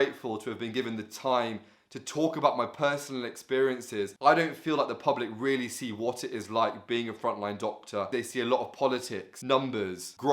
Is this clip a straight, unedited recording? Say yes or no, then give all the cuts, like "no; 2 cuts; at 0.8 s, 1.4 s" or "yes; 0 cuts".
no; 3 cuts; at 4.1 s, 8.1 s, 9.6 s